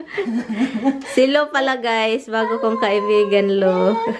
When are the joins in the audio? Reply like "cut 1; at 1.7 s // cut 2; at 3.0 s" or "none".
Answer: none